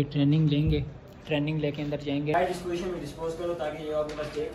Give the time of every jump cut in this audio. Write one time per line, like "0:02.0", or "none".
0:02.3